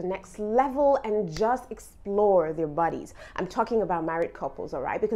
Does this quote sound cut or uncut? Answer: uncut